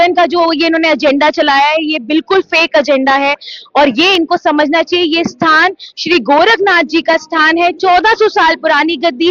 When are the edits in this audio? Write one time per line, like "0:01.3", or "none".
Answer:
none